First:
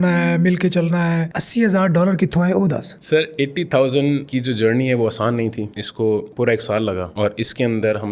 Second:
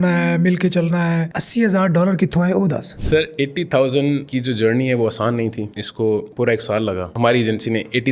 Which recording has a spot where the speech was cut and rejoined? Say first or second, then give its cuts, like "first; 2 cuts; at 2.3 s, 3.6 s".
second; 1 cut; at 7.1 s